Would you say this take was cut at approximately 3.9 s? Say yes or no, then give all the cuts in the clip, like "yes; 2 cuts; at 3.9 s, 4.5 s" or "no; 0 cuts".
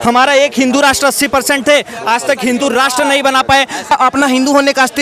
yes; 1 cut; at 3.9 s